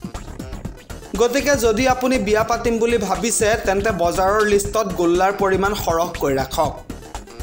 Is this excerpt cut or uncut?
cut